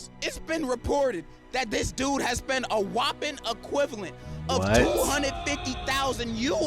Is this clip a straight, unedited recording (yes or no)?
yes